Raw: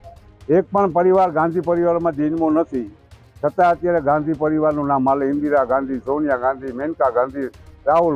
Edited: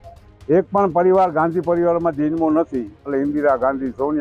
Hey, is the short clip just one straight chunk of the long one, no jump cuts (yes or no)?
no